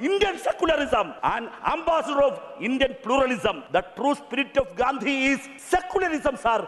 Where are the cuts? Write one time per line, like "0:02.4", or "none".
0:01.1
0:03.6
0:05.5